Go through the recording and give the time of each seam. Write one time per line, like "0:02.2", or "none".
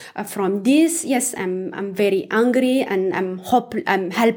none